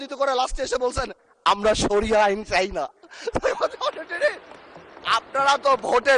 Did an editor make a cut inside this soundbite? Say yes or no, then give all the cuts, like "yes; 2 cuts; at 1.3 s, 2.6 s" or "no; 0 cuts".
no; 0 cuts